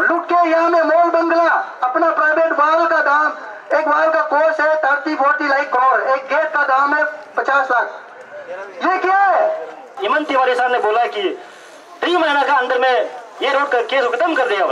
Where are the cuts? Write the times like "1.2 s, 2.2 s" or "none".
10.0 s